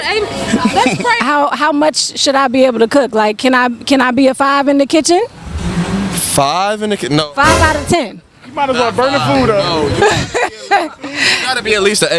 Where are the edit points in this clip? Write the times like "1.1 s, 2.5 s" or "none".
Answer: 1.2 s